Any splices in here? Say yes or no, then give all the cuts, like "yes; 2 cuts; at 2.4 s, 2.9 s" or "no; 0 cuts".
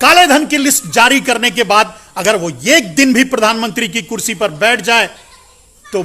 no; 0 cuts